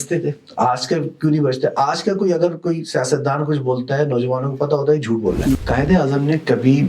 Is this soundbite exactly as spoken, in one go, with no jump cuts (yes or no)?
no